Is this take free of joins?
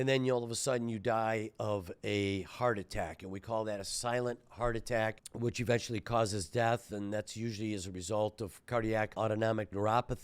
no; 2 cuts; at 5.2 s, 9.1 s

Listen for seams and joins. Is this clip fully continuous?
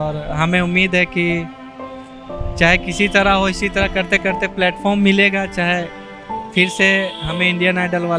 yes; 0 cuts

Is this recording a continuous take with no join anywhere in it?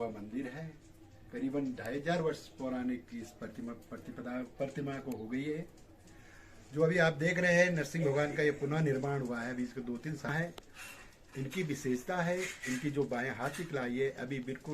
no; 1 cut; at 10.3 s

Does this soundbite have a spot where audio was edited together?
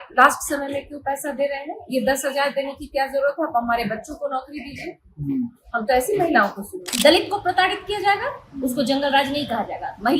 yes; 1 cut; at 6.9 s

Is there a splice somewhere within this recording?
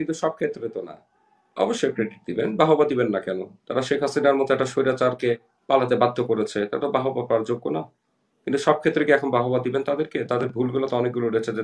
no; 0 cuts

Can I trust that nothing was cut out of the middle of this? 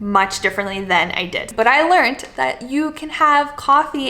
no; 1 cut; at 1.5 s

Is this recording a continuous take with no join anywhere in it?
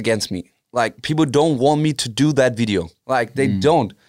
no; 1 cut; at 2.9 s

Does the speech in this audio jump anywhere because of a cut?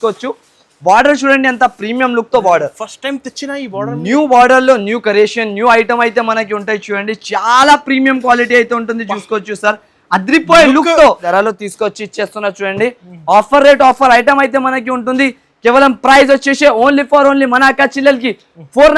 yes; 1 cut; at 11.2 s

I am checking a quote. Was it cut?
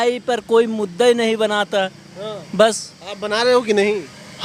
no; 0 cuts

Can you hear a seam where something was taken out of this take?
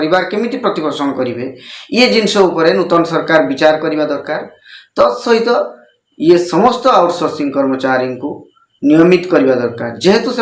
no; 0 cuts

